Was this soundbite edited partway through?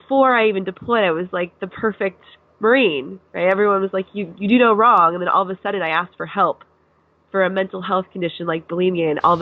no; 0 cuts

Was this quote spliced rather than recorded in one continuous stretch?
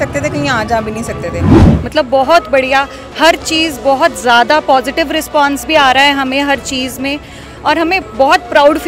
yes; 1 cut; at 1.7 s

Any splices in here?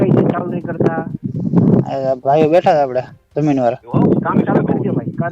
yes; 1 cut; at 3.8 s

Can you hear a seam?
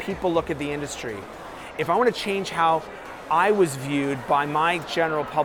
no; 0 cuts

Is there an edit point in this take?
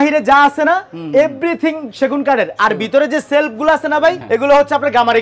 no; 0 cuts

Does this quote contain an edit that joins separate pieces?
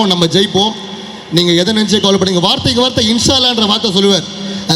no; 0 cuts

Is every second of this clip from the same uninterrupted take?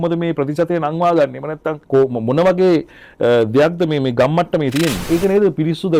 no; 2 cuts; at 1.7 s, 5.0 s

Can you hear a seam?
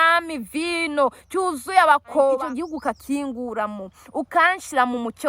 yes; 1 cut; at 2.4 s

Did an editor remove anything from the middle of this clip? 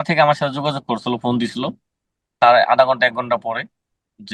no; 0 cuts

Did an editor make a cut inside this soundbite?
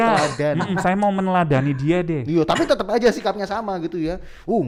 no; 0 cuts

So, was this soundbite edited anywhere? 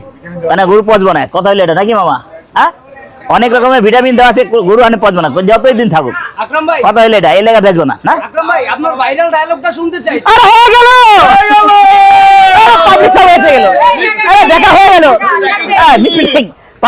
no; 0 cuts

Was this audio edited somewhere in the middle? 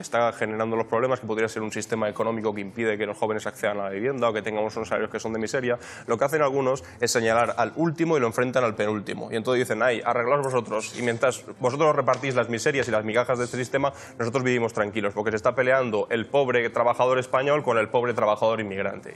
no; 0 cuts

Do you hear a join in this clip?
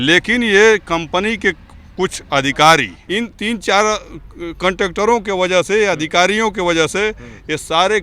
yes; 1 cut; at 3.0 s

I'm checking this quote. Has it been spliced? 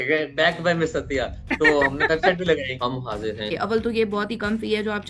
yes; 1 cut; at 3.1 s

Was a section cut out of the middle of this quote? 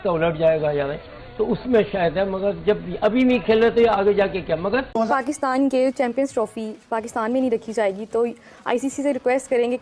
yes; 1 cut; at 5.1 s

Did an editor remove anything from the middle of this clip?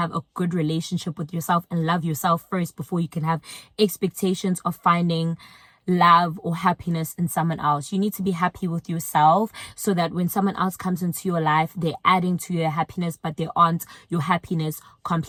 no; 0 cuts

